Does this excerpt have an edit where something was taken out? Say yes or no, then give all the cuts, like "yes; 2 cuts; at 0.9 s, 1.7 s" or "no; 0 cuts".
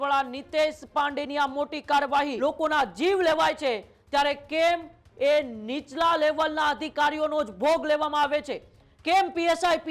yes; 1 cut; at 2.3 s